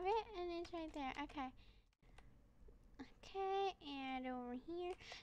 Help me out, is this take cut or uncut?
cut